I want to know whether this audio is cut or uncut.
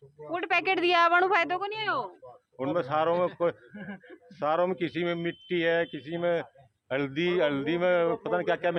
uncut